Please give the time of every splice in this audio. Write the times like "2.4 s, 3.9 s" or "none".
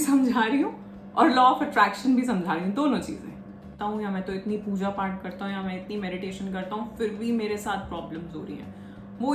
3.8 s